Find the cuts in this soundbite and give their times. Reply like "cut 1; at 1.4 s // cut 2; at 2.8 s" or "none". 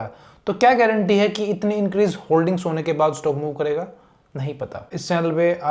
cut 1; at 4.8 s